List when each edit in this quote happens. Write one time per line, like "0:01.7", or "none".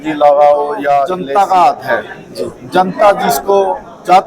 0:01.2